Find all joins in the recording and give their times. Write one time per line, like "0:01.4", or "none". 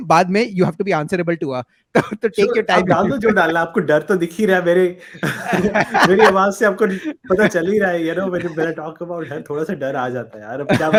none